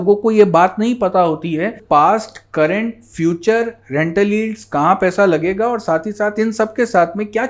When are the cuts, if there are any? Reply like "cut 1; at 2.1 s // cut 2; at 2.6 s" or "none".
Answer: cut 1; at 1.8 s